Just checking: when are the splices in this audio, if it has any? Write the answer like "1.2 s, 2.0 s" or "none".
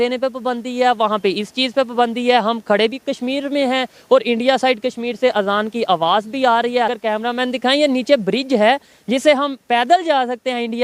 6.9 s